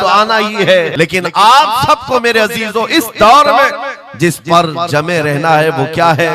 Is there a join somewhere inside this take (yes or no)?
yes